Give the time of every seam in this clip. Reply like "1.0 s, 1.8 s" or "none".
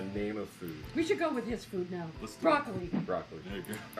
1.3 s, 3.1 s